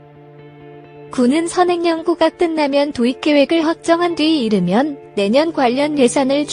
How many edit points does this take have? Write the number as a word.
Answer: one